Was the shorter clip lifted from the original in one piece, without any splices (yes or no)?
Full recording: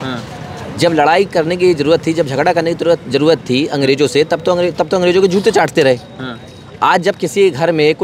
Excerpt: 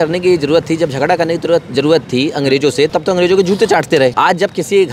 no